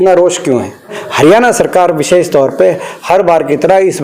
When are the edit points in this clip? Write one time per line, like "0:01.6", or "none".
0:01.0